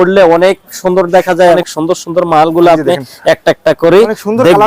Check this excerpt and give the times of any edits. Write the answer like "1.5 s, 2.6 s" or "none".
1.6 s